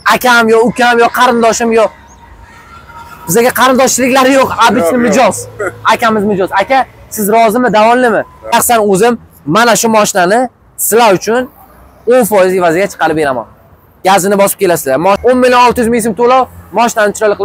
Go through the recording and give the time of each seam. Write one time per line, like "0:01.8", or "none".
0:08.5
0:15.2